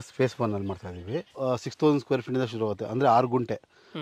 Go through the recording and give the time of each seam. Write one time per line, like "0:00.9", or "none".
0:01.3